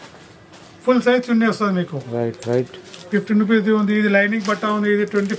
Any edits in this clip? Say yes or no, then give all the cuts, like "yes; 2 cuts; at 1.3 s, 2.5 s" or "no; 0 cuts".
no; 0 cuts